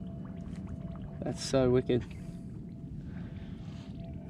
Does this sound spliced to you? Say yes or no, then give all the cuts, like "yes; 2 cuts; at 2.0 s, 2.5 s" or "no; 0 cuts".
no; 0 cuts